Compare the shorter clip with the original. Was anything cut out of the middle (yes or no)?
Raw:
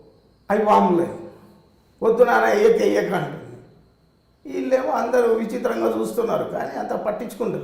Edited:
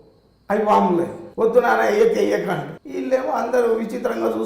yes